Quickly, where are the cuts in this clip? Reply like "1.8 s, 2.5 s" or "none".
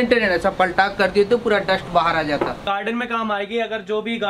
2.6 s